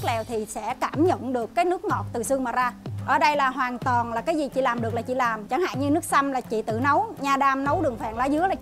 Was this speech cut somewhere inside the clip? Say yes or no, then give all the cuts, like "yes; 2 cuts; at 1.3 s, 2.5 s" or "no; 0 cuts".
yes; 2 cuts; at 2.9 s, 5.4 s